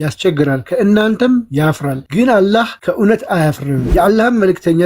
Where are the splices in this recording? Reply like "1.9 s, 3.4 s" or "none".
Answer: 1.9 s, 2.7 s, 3.8 s